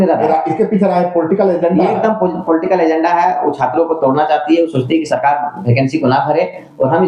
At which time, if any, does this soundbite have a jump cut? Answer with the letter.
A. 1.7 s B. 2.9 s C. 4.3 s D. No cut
D